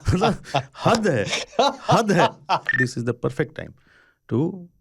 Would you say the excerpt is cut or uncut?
cut